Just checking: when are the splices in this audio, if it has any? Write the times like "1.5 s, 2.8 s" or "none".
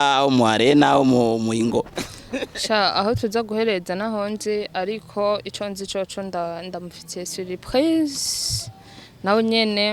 none